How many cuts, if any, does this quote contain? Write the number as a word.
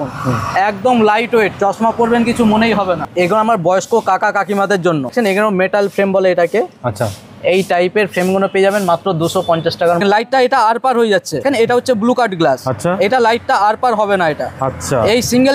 four